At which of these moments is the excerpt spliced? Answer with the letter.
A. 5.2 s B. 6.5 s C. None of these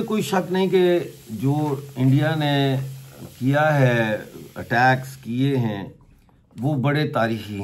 C